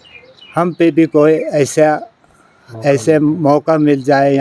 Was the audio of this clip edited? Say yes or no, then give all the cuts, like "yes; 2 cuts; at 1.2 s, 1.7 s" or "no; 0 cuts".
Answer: no; 0 cuts